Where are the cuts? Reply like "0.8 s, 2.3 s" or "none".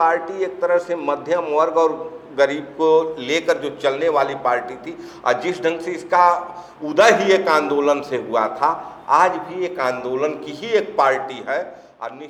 none